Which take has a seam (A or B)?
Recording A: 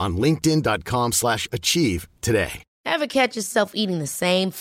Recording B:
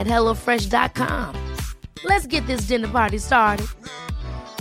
A